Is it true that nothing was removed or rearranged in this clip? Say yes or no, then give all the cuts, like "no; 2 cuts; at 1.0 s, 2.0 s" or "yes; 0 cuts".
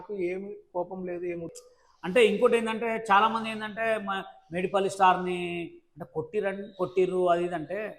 no; 1 cut; at 1.5 s